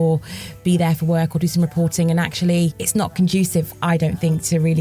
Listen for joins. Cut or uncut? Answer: cut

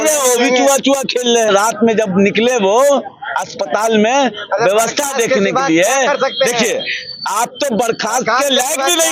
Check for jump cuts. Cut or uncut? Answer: cut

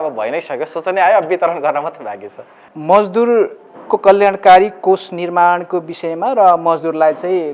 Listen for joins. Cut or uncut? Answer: uncut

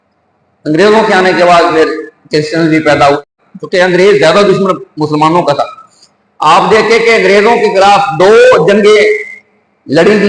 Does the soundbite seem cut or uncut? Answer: cut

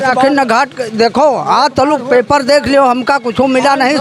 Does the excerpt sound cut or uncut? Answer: uncut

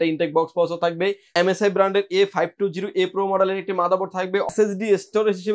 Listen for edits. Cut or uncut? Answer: cut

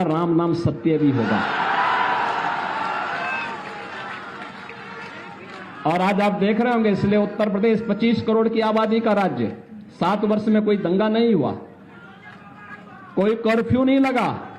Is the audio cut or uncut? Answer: uncut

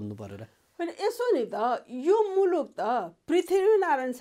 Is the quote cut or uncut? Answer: uncut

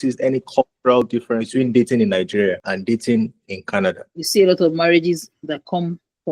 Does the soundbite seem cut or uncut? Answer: cut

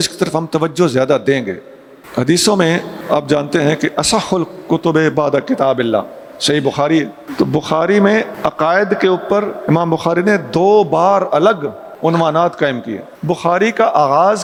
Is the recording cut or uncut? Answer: uncut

